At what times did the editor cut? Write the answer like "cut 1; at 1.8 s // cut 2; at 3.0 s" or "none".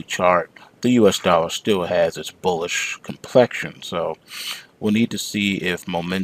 cut 1; at 1.7 s